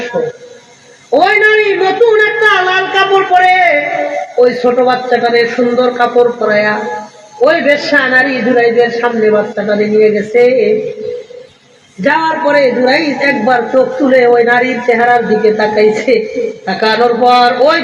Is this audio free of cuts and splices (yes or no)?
no